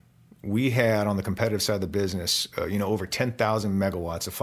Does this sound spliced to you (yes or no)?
no